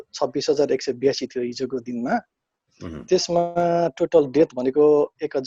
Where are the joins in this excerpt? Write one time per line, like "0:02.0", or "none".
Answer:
none